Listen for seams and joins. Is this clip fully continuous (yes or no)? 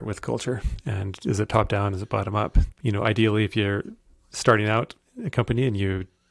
no